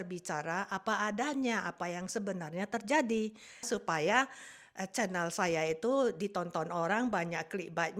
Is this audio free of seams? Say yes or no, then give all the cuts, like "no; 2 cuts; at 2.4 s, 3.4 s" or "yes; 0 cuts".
no; 1 cut; at 3.7 s